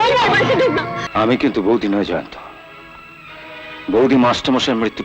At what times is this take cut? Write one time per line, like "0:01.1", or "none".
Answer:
0:01.0